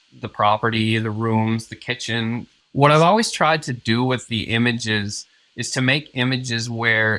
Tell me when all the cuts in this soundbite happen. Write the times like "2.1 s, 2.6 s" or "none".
2.6 s